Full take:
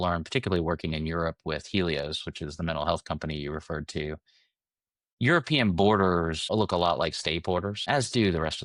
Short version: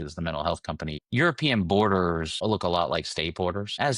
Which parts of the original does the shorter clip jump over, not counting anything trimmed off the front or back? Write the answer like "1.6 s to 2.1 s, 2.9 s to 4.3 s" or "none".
3.4 s to 5.1 s